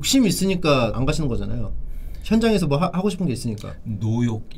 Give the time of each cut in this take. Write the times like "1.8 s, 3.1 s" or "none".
none